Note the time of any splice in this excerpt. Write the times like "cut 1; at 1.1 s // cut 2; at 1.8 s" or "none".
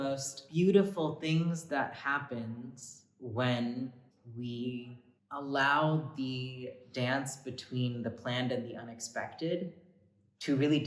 none